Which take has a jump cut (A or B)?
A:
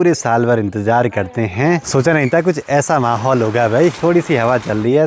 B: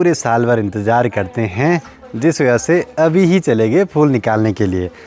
A